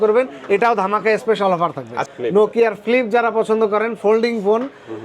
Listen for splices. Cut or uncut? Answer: cut